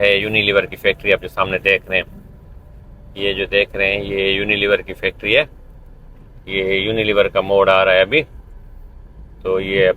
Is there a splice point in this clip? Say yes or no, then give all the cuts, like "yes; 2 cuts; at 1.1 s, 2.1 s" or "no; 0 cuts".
no; 0 cuts